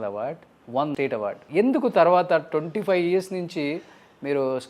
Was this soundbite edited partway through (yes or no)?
yes